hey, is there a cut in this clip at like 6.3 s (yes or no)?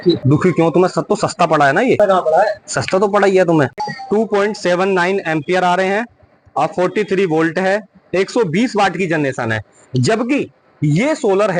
no